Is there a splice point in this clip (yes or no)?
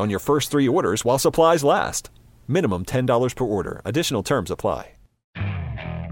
yes